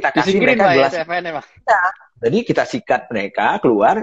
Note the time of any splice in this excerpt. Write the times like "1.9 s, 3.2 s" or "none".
none